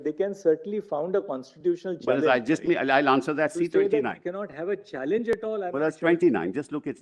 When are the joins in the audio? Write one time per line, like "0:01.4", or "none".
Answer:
none

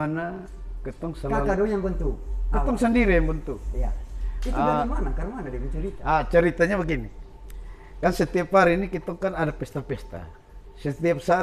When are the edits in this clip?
none

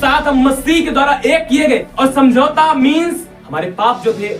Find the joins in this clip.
0:01.9
0:03.4

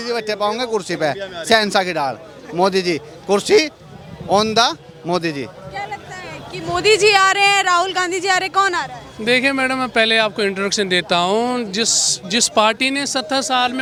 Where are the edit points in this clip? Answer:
none

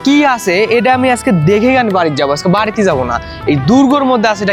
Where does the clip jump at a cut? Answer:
none

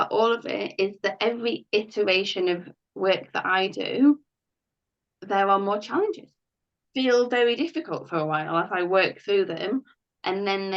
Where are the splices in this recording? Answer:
0:06.8

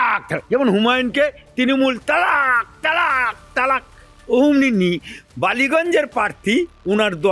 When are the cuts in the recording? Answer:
none

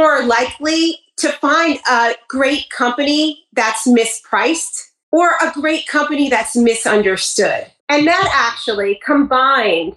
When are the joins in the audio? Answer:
none

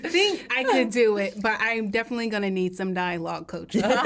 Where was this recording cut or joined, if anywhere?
none

